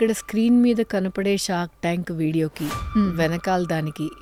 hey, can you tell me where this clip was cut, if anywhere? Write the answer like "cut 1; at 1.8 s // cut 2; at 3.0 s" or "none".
none